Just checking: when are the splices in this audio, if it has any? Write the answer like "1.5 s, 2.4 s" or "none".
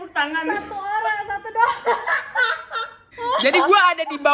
3.1 s